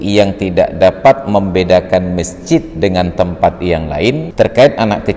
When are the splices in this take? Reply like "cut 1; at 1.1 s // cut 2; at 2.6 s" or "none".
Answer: cut 1; at 4.3 s